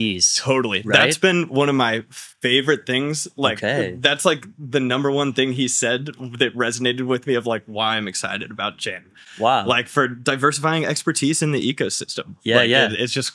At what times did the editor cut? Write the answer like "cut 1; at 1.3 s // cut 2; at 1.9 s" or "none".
none